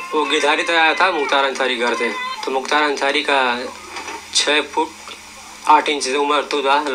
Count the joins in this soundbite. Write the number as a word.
one